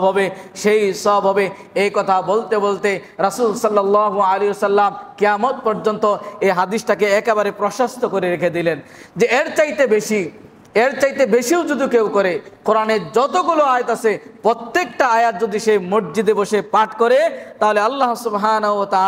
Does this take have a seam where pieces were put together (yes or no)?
no